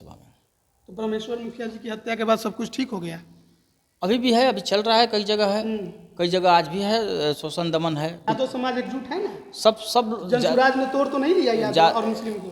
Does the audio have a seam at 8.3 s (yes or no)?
yes